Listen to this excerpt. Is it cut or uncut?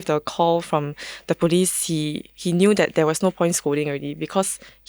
uncut